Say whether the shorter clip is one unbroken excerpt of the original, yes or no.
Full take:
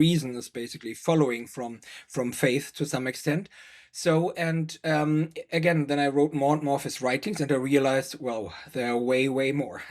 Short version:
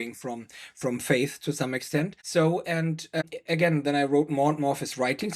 no